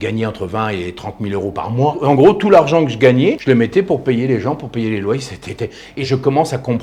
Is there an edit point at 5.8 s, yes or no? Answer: yes